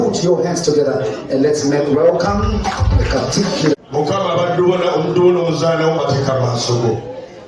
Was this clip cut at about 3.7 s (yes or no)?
yes